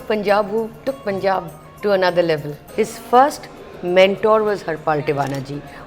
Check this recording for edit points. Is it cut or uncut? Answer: cut